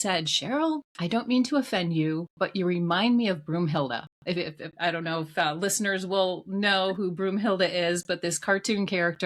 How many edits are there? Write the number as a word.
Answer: one